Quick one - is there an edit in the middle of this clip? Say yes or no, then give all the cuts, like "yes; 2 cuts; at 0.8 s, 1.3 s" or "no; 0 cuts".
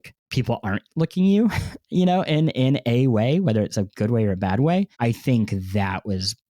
no; 0 cuts